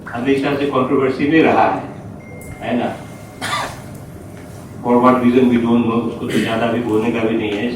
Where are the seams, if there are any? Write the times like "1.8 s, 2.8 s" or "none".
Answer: none